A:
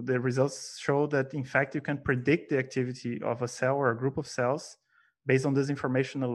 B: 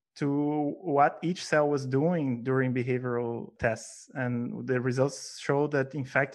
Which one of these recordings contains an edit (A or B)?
B